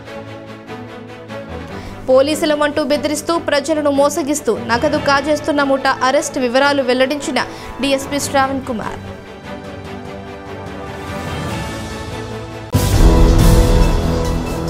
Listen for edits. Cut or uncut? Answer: cut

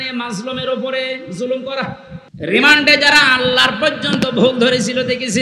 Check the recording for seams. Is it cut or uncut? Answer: cut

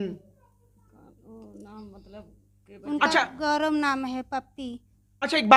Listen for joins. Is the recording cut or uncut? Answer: uncut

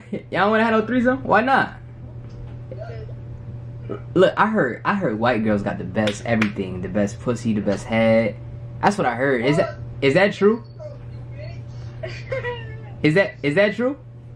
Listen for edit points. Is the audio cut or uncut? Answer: uncut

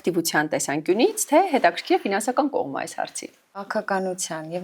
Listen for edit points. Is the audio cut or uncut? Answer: cut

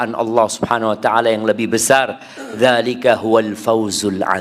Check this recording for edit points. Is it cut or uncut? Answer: uncut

